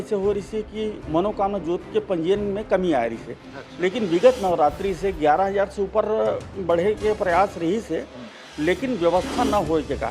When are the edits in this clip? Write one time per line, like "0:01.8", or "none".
0:01.0